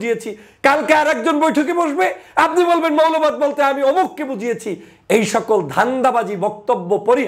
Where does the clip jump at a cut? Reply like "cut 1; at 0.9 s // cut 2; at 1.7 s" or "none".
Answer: none